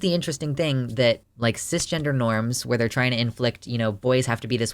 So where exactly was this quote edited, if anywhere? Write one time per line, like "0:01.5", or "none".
0:01.3